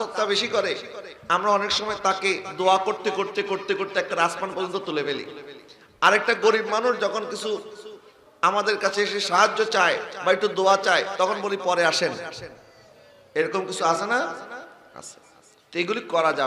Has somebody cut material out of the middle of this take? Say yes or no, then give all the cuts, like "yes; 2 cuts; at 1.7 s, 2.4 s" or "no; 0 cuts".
no; 0 cuts